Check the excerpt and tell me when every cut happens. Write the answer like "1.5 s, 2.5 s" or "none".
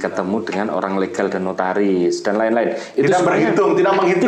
none